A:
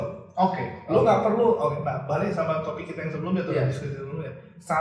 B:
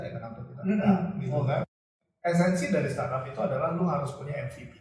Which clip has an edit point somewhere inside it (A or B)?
B